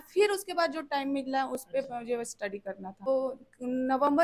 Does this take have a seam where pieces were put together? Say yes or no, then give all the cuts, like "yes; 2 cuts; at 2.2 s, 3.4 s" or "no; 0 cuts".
yes; 1 cut; at 3.1 s